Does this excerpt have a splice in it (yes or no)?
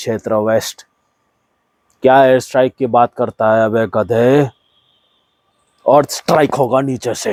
no